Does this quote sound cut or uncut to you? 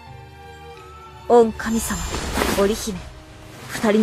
cut